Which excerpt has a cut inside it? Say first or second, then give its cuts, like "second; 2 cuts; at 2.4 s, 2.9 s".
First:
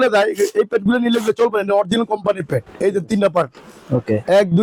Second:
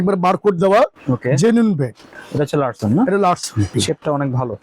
second; 2 cuts; at 2.1 s, 3.7 s